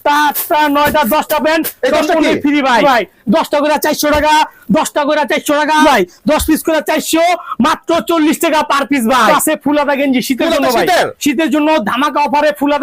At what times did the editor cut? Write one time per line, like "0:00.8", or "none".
0:02.8
0:05.8
0:09.3